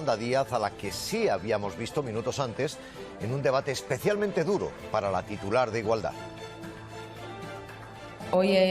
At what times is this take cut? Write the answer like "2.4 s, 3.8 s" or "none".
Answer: 4.1 s, 6.7 s